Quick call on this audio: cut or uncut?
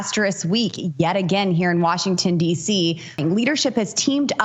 cut